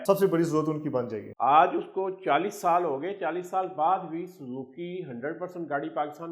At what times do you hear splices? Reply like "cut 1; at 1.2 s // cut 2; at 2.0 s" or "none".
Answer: cut 1; at 1.3 s